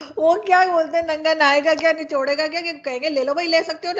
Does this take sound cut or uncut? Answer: uncut